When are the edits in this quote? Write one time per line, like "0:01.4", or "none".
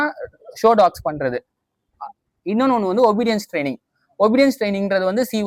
none